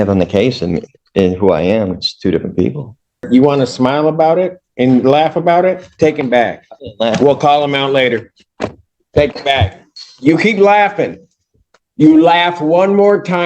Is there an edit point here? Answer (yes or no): yes